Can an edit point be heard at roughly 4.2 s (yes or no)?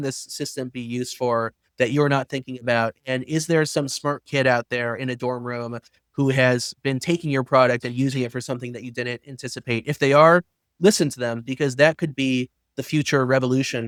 no